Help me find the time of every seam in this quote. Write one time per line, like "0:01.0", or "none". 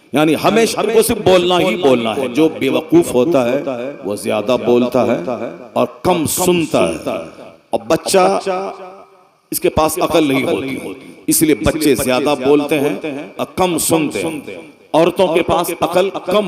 none